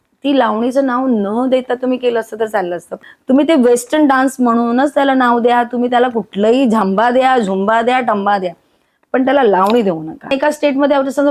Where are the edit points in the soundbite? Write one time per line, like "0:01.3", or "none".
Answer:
0:03.0
0:10.3